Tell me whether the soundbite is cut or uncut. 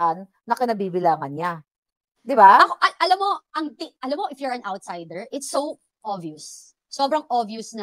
uncut